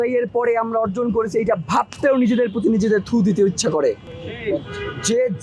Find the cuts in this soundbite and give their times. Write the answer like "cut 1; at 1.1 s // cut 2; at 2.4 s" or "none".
none